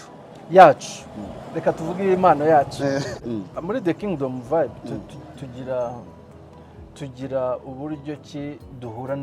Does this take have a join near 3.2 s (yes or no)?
yes